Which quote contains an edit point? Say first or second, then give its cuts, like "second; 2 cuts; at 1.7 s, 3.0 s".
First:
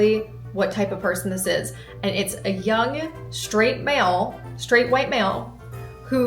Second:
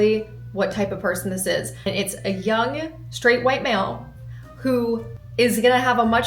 second; 3 cuts; at 1.7 s, 3.0 s, 5.2 s